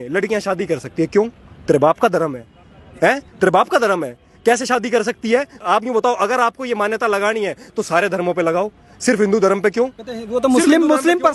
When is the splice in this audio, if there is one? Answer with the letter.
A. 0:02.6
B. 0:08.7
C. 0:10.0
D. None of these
D